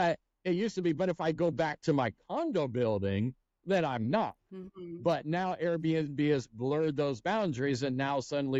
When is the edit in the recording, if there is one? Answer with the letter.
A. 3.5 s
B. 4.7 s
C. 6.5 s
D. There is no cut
D